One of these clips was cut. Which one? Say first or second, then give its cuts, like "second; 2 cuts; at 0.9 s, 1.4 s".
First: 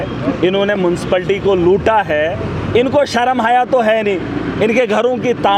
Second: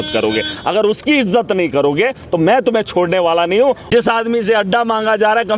second; 1 cut; at 3.8 s